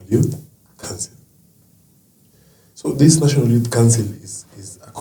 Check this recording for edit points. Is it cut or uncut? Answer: uncut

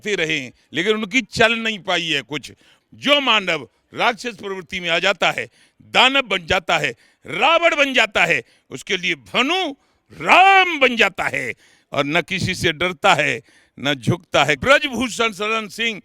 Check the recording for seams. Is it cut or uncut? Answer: cut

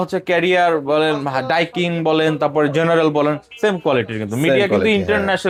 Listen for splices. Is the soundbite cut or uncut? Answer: uncut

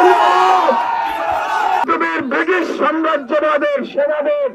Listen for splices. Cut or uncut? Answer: cut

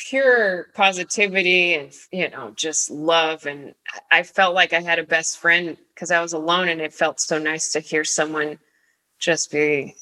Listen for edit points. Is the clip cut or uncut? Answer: cut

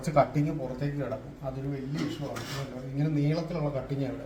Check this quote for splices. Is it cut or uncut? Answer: uncut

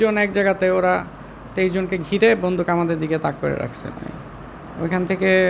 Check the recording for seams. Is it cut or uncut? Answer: uncut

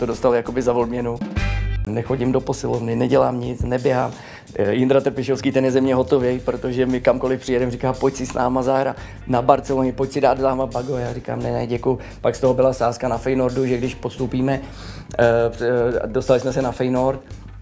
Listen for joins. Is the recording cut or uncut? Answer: cut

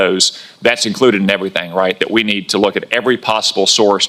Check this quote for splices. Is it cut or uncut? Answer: uncut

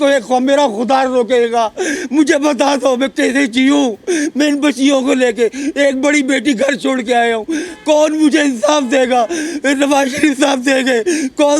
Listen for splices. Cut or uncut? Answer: uncut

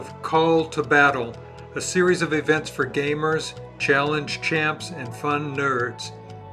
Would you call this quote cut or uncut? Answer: uncut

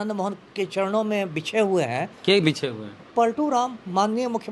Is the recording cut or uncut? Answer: uncut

